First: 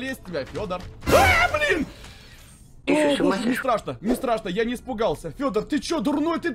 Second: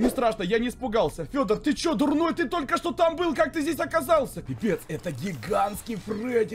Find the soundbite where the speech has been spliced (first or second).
second